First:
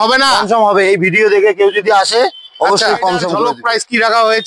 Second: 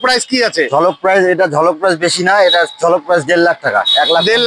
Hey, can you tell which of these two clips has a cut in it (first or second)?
first